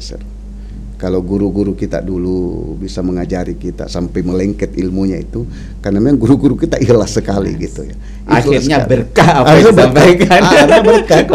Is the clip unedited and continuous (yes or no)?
yes